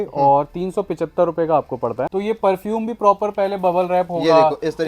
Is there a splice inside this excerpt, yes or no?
yes